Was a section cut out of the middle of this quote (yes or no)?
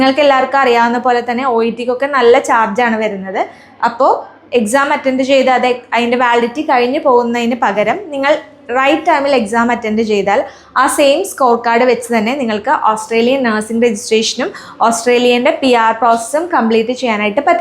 no